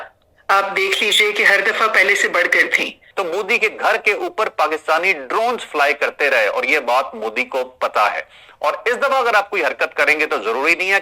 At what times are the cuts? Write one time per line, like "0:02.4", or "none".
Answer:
0:03.0